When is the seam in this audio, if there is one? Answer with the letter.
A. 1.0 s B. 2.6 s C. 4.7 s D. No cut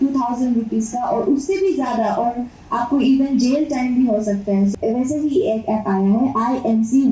C